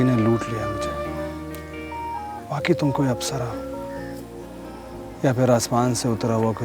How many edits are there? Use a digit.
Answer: 2